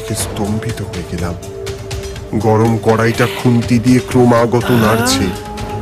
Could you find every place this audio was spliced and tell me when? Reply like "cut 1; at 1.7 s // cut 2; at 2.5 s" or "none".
none